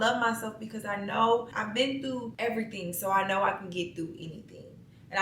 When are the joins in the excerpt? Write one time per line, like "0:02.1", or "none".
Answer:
0:01.8